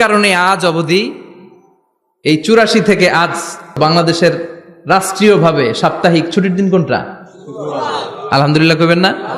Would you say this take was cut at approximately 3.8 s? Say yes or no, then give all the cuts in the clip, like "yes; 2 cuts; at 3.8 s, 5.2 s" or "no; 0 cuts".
yes; 1 cut; at 3.8 s